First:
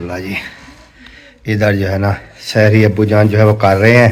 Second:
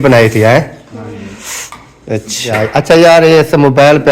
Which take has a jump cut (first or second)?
second